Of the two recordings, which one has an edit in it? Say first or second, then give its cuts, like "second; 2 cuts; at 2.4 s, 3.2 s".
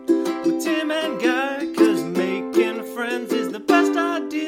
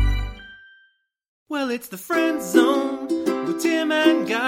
second; 1 cut; at 1.4 s